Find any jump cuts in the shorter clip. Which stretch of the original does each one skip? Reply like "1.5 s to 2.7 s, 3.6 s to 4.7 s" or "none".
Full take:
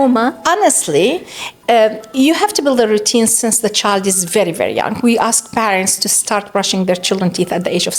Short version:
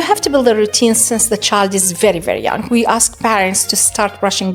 none

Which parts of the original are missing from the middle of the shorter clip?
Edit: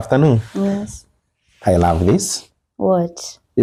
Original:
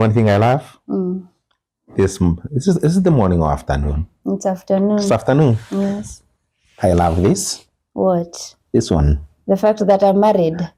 none

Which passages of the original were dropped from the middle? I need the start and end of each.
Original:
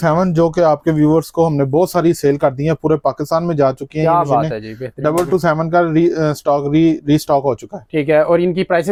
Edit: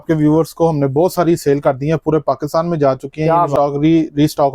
4.3 s to 6.4 s

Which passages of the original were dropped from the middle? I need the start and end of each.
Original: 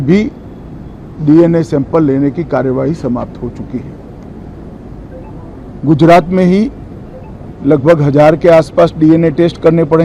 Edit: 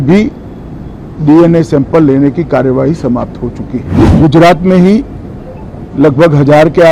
4.0 s to 5.6 s

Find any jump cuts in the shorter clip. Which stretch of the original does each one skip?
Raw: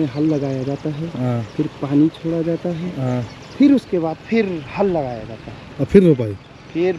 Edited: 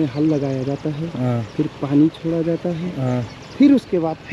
none

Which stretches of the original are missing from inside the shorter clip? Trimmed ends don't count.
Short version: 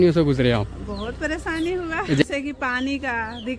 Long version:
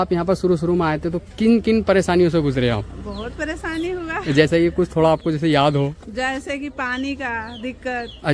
4.4 s to 6.4 s

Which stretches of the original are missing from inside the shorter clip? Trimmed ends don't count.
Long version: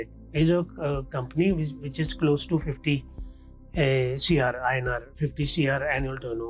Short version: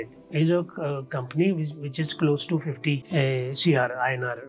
3.0 s to 3.7 s

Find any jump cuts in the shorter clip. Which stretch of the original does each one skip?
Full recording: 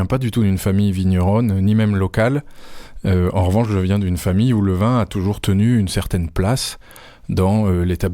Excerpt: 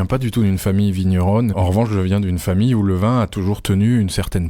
1.6 s to 3.3 s

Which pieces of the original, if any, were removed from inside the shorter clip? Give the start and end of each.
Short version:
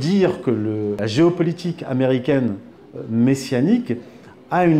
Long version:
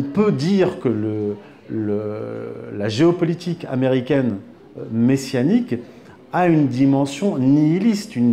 1.4 s to 2.8 s

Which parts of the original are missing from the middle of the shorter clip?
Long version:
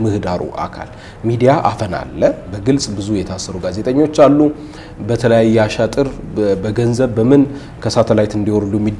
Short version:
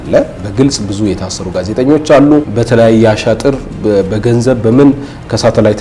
4.6 s to 5.1 s

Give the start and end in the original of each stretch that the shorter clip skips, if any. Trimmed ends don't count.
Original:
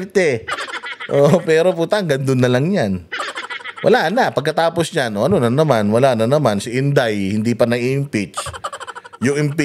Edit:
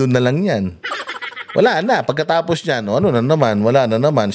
none

